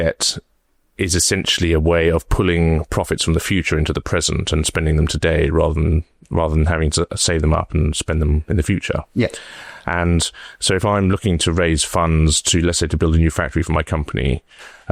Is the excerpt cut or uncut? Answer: uncut